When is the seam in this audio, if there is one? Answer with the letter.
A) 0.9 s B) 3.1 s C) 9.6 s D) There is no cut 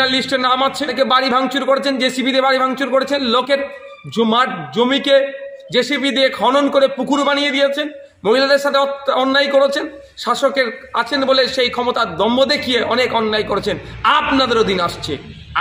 A